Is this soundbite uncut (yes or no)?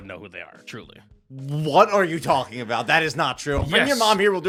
yes